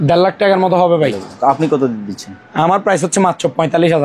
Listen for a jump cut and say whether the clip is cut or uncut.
uncut